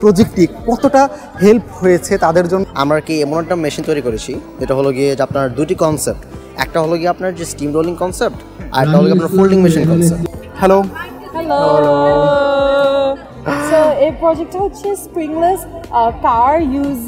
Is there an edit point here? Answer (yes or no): yes